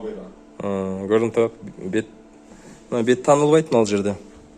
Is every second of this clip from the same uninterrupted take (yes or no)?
yes